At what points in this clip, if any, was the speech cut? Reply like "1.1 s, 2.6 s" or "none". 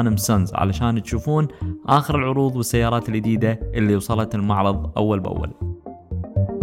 5.5 s